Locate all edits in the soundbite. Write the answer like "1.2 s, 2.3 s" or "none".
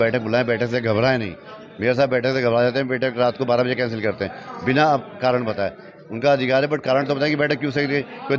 none